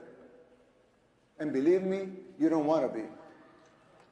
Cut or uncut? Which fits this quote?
cut